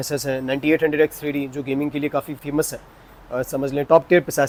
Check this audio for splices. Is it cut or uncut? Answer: uncut